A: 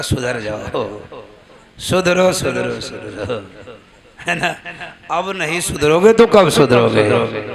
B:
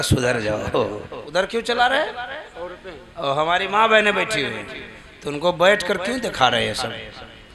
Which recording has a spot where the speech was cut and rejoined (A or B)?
B